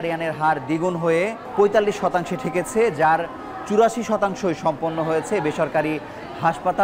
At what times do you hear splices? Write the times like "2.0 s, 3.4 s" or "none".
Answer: 1.4 s